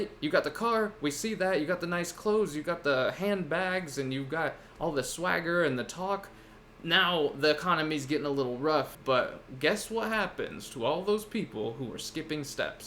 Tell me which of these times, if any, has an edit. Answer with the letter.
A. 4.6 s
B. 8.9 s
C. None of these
B